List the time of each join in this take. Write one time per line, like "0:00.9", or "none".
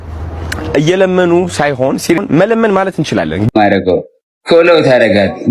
0:02.2
0:03.5